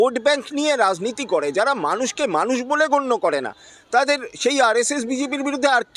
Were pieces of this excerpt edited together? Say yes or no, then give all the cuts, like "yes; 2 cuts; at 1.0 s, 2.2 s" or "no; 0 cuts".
no; 0 cuts